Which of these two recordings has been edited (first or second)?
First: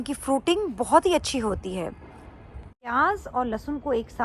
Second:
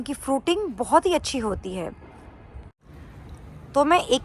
first